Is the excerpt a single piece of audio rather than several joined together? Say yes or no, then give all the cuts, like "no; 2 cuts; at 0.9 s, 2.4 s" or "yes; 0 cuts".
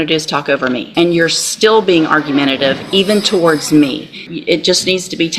no; 2 cuts; at 0.9 s, 4.2 s